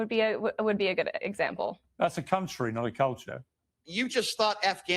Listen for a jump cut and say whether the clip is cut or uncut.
cut